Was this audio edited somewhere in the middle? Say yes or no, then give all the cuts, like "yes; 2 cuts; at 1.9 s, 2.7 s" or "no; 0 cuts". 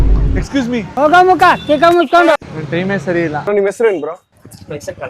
yes; 1 cut; at 3.5 s